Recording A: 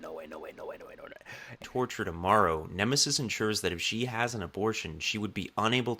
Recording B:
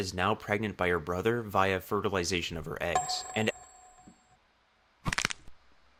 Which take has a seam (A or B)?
A